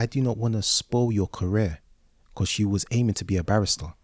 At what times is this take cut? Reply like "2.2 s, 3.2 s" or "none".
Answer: none